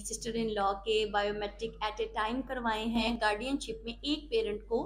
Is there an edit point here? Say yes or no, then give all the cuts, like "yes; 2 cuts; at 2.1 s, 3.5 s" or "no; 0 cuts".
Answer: yes; 1 cut; at 3.1 s